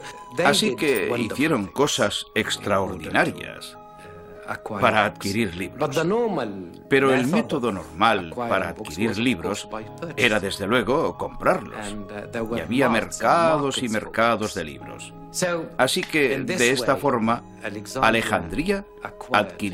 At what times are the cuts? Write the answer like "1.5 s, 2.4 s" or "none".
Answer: 12.2 s